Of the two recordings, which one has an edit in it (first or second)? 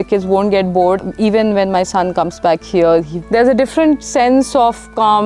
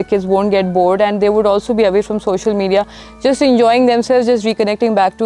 first